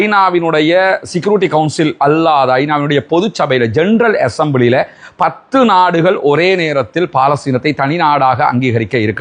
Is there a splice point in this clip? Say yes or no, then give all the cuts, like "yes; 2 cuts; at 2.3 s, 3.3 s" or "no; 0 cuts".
no; 0 cuts